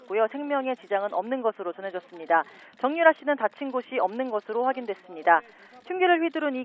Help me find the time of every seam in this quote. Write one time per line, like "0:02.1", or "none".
0:02.5